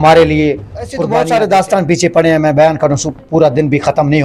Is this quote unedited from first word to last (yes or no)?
no